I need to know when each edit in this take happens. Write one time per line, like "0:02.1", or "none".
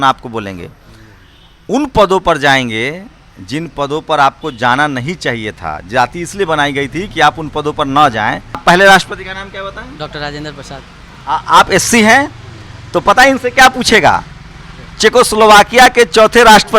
0:08.6